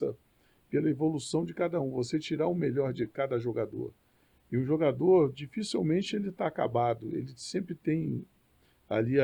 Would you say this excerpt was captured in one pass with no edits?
yes; 0 cuts

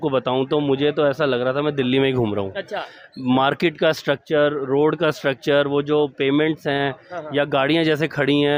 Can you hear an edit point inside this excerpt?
no; 0 cuts

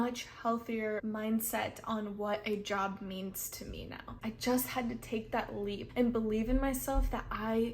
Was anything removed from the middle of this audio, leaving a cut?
yes; 3 cuts; at 1.0 s, 4.1 s, 5.8 s

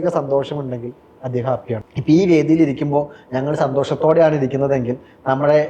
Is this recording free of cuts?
no; 1 cut; at 1.9 s

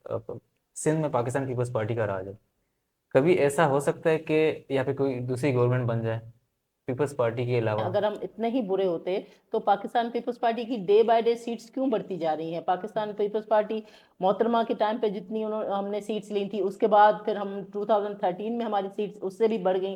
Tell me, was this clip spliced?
yes; 1 cut; at 7.9 s

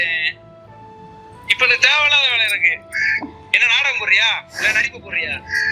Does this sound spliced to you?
no; 0 cuts

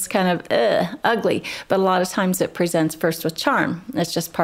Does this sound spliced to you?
no; 0 cuts

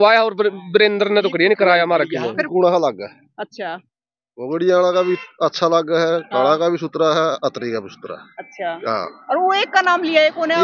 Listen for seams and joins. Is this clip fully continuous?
no; 1 cut; at 2.3 s

